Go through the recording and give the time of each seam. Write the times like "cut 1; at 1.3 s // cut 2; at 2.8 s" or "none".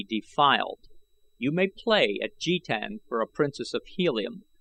none